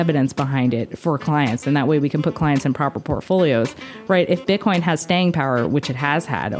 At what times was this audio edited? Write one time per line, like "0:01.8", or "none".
none